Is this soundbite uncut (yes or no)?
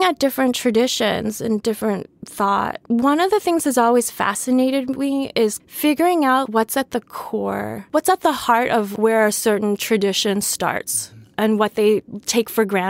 no